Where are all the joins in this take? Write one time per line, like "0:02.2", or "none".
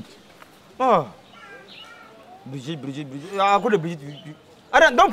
none

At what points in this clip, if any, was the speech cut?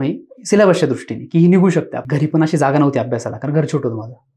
0:02.1

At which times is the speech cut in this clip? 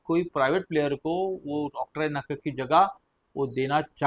none

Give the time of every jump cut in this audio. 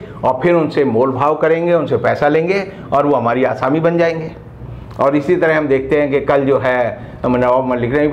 none

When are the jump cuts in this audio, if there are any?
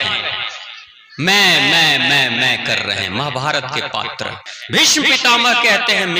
0:04.4

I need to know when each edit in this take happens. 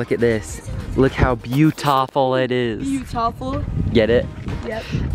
none

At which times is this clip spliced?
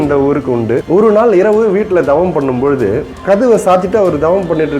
0:00.8
0:03.1

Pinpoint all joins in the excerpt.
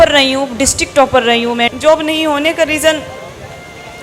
0:01.7

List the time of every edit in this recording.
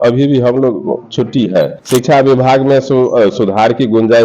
0:01.8

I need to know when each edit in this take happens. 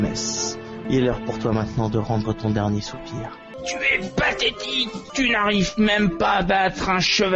0:03.5
0:05.0

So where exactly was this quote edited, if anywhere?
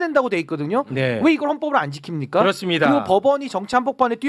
none

